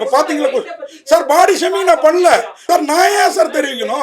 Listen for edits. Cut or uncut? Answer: cut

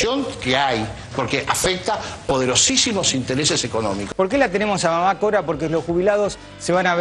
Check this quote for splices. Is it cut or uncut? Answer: cut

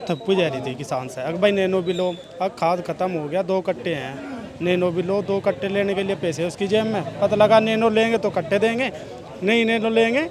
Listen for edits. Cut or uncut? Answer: uncut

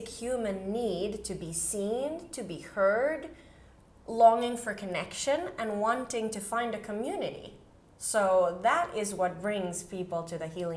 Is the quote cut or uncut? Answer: uncut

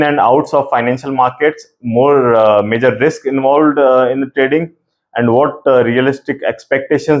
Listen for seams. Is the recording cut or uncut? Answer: uncut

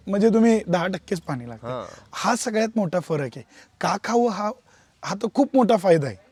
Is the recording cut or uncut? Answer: uncut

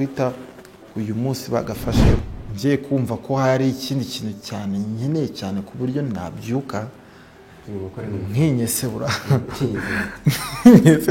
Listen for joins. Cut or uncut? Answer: cut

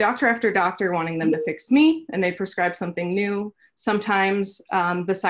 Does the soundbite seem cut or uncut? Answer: uncut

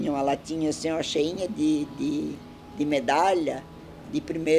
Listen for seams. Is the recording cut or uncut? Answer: uncut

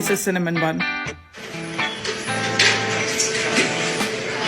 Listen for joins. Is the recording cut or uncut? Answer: cut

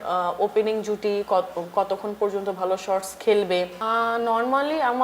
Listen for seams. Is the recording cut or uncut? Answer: cut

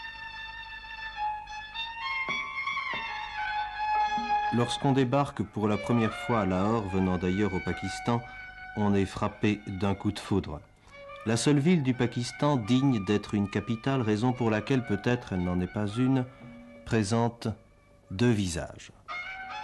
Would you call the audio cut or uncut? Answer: uncut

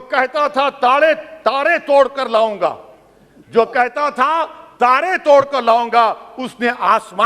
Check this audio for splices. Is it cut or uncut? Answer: uncut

